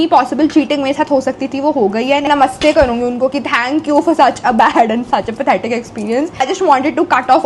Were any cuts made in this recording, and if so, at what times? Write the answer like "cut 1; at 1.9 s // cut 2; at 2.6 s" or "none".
cut 1; at 2.3 s // cut 2; at 6.4 s